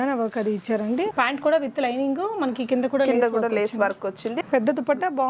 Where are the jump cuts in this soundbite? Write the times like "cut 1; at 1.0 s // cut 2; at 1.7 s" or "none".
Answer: cut 1; at 1.1 s